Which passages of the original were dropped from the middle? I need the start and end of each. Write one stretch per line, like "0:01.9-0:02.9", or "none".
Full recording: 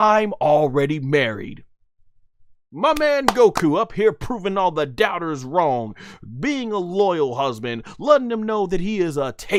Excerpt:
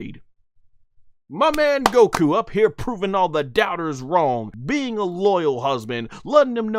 0:06.0-0:06.3

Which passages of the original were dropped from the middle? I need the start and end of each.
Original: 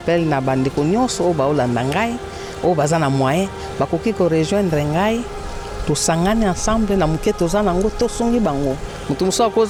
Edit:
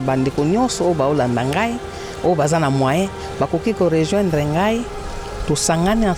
none

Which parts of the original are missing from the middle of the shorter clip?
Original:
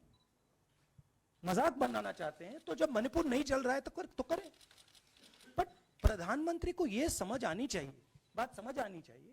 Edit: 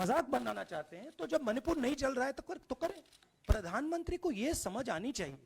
0:04.8-0:05.8

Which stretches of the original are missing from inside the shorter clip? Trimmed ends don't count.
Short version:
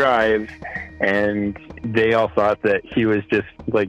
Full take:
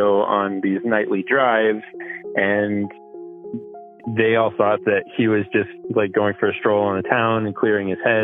0:03.0-0:03.9

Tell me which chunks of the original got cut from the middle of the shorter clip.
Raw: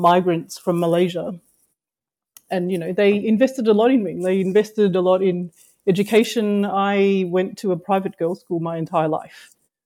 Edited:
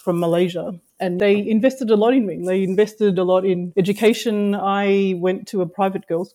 0:01.7-0:02.9
0:05.4-0:05.8

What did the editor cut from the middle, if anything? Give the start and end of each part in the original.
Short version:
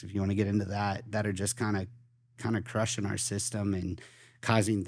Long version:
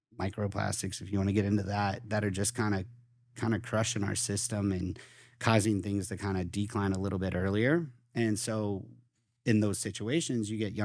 none

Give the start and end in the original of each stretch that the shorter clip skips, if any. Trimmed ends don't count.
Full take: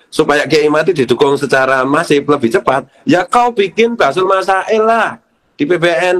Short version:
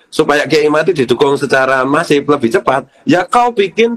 none

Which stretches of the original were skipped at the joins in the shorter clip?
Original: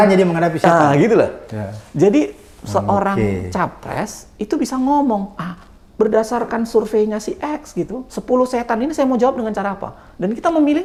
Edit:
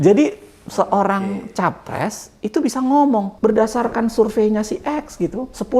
0:05.3-0:05.9

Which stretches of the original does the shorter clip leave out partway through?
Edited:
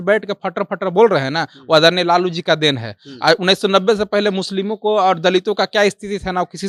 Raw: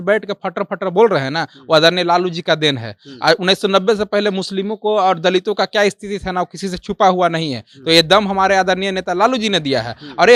none

